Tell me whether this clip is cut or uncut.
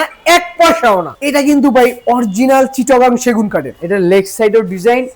cut